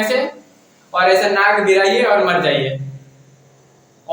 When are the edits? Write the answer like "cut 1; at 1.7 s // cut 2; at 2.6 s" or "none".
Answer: none